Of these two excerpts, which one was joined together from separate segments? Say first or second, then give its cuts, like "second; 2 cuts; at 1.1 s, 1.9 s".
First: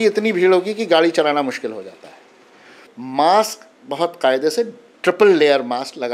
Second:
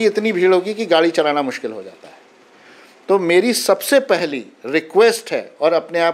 first; 1 cut; at 2.9 s